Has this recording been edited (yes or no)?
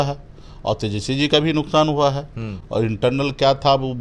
no